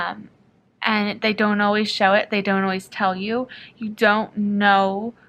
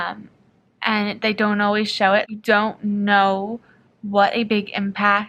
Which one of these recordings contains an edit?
second; 1 cut; at 2.3 s

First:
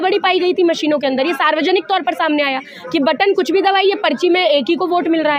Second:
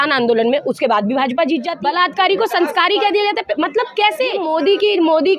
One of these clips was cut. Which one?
second; 2 cuts; at 1.7 s, 4.4 s

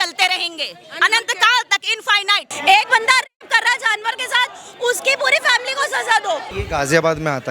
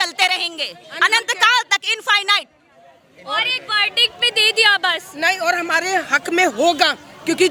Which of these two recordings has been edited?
first; 2 cuts; at 2.4 s, 6.5 s

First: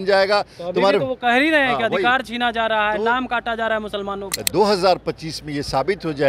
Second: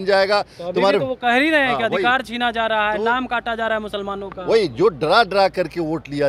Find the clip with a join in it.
first; 1 cut; at 4.3 s

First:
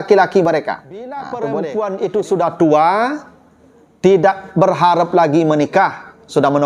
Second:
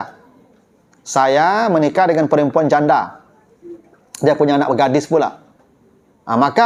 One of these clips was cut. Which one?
first; 1 cut; at 1.3 s

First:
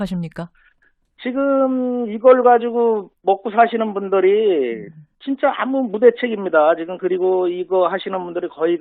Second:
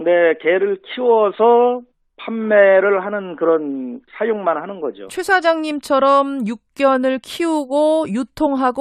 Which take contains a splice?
first; 1 cut; at 6.6 s

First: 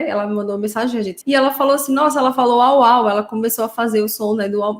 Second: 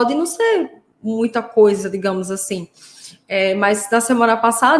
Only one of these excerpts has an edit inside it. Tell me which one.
first; 1 cut; at 1.1 s

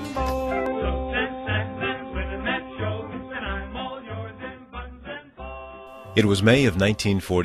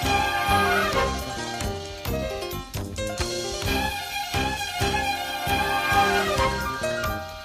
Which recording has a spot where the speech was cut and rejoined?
second; 1 cut; at 3.3 s

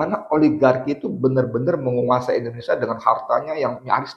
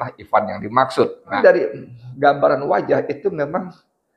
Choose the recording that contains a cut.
second; 1 cut; at 1.3 s

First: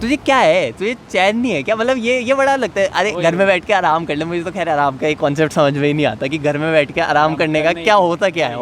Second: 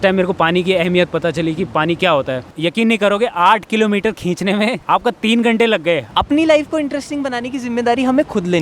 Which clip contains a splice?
second; 3 cuts; at 2.5 s, 4.8 s, 6.1 s

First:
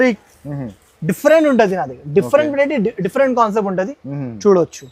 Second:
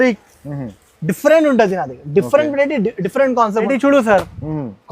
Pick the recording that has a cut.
second; 1 cut; at 3.6 s

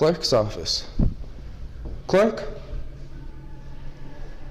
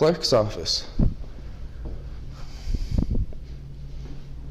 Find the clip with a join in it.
first; 1 cut; at 1.8 s

